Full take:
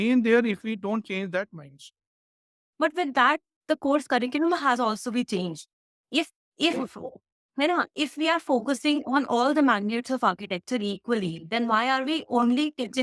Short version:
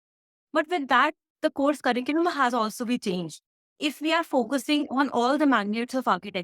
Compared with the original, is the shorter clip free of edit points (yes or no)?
no